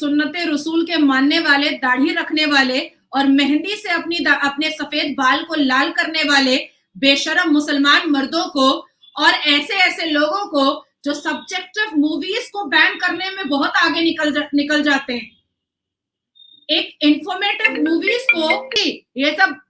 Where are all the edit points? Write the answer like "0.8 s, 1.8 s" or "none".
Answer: 18.7 s